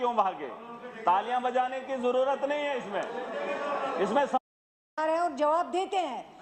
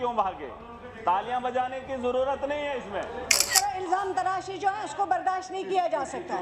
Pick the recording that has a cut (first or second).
second